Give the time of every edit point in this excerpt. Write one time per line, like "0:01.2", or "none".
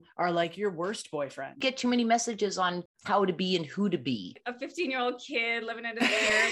0:01.6
0:02.9
0:04.4